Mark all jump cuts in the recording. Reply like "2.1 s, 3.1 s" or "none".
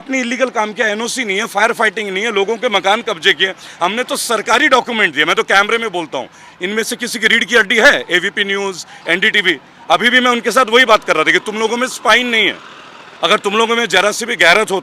none